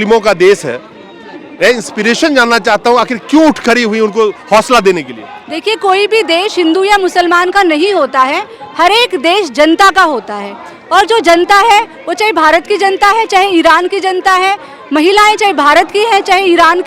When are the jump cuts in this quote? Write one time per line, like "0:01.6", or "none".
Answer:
none